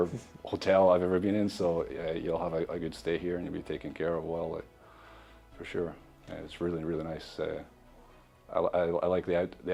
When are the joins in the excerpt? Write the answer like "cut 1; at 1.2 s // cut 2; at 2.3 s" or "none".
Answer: none